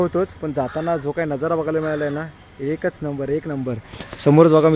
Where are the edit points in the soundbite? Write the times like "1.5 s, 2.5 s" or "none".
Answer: none